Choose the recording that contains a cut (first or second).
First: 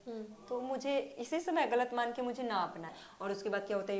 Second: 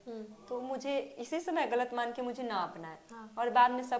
first